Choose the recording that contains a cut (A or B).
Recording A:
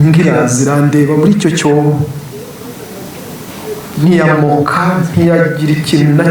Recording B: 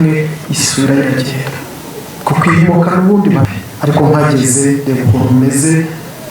B